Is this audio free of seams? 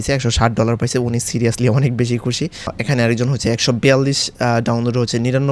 no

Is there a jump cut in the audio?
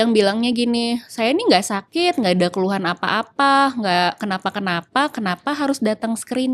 no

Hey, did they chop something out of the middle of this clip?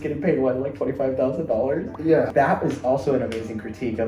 yes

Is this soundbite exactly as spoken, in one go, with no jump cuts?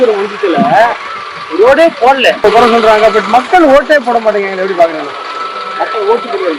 no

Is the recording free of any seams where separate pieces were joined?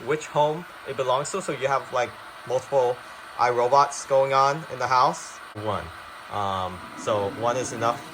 no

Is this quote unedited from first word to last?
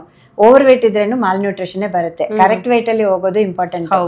yes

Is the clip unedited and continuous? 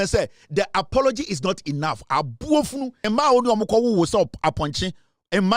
no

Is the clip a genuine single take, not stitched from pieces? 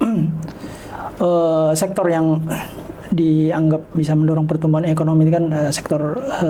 yes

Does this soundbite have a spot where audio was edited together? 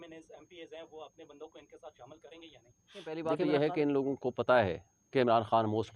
yes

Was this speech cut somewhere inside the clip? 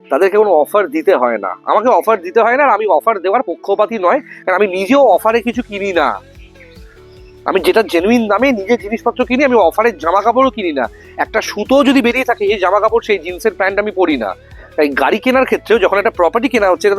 no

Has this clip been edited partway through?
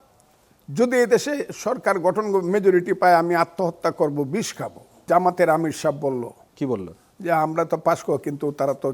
yes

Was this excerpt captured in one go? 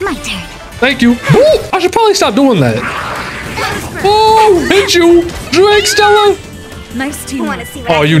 yes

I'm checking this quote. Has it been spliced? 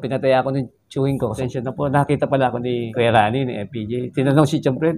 yes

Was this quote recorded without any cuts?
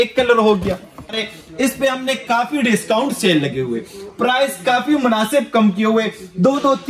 no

